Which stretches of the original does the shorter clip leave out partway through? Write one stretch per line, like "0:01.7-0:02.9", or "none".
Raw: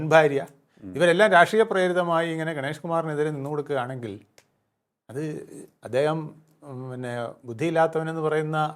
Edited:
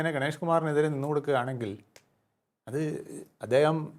none